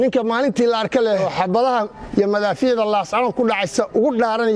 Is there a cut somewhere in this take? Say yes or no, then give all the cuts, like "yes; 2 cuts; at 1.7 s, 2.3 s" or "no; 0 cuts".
yes; 1 cut; at 1.2 s